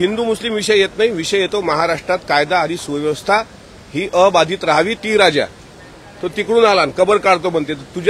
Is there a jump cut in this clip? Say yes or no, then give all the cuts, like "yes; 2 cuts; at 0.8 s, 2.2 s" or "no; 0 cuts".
yes; 1 cut; at 5.0 s